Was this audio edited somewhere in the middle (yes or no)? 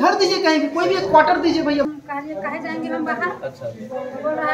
yes